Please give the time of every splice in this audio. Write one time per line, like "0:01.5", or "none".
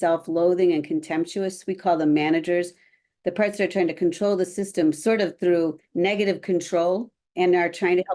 0:07.2